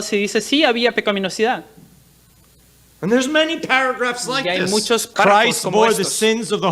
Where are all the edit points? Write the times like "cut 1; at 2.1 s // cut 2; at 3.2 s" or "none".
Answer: cut 1; at 5.1 s